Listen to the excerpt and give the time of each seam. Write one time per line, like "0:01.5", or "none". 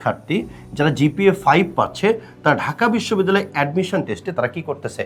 none